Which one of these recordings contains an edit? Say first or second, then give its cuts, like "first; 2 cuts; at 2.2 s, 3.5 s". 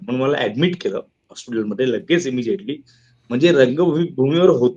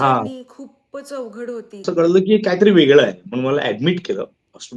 second; 1 cut; at 1.7 s